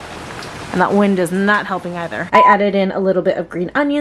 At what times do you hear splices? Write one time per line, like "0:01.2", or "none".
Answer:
0:02.3

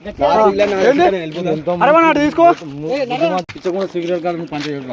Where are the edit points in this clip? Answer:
0:03.5

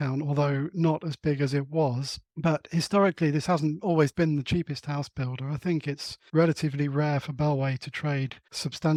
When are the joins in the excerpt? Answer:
none

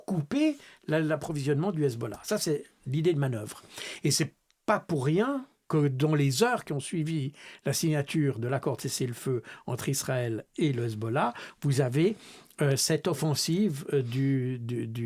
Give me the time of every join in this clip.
none

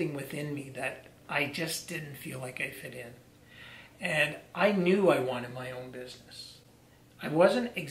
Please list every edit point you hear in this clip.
none

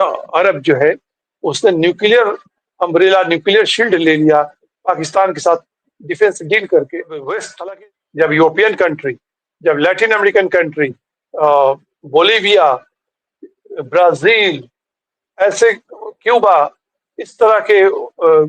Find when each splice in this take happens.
0:07.5

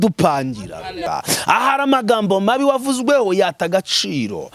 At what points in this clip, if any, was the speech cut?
0:01.0

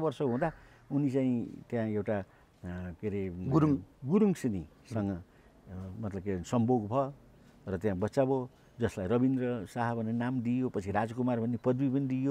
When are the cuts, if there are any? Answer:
none

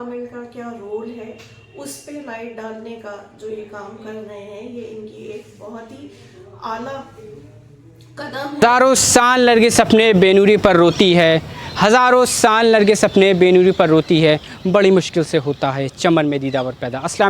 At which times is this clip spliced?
0:08.6

